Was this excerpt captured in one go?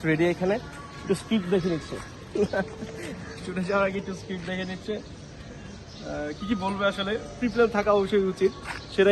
yes; 0 cuts

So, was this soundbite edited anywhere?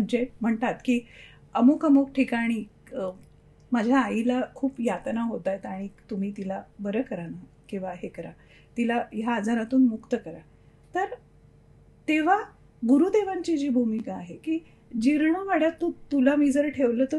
no; 0 cuts

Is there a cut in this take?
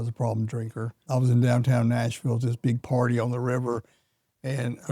yes; 1 cut; at 1.0 s

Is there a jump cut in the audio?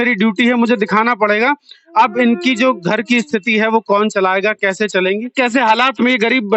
yes; 1 cut; at 5.3 s

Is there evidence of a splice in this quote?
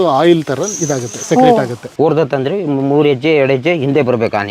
yes; 1 cut; at 1.8 s

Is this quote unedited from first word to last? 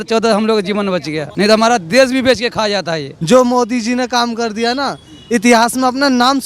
no; 2 cuts; at 1.2 s, 3.1 s

